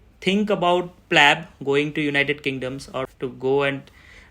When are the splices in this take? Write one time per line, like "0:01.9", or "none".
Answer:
0:03.1